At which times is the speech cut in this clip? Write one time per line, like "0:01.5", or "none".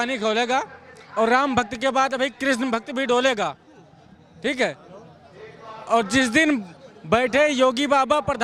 none

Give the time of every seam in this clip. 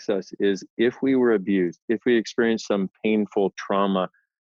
none

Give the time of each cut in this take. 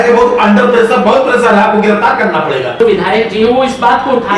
0:02.8

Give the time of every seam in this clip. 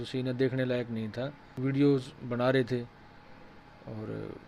0:01.6

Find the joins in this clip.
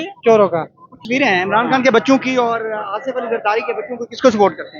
0:00.9

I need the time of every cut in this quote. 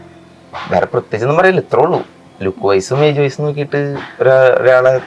none

